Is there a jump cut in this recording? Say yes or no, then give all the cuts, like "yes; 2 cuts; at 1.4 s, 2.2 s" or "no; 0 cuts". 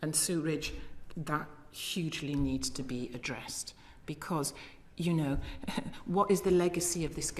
no; 0 cuts